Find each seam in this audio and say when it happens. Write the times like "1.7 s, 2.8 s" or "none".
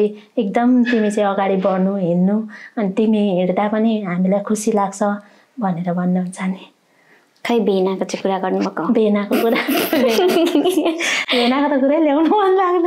none